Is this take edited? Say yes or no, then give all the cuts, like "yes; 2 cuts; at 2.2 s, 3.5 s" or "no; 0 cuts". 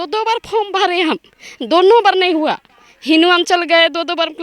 no; 0 cuts